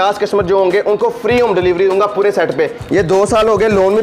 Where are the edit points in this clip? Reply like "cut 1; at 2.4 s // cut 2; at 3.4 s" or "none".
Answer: cut 1; at 2.8 s